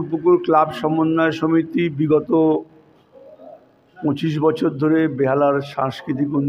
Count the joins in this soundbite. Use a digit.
0